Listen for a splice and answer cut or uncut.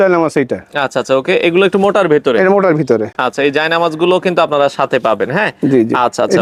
uncut